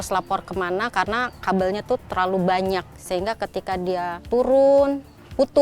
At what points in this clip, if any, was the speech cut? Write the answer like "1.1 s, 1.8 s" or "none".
3.0 s, 4.2 s